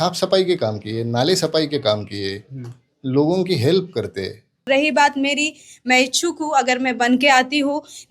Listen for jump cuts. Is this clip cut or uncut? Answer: cut